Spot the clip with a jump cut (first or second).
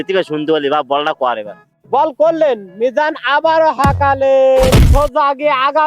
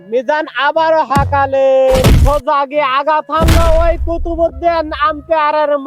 first